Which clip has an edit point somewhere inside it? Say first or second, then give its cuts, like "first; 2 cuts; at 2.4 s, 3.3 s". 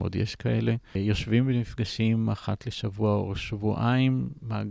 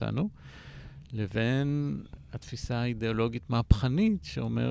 first; 1 cut; at 1.0 s